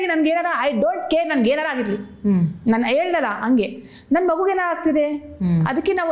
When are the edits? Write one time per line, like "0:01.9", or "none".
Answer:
none